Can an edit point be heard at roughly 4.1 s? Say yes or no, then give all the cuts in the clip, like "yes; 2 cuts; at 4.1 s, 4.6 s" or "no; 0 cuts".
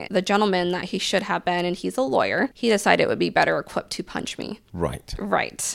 no; 1 cut; at 2.5 s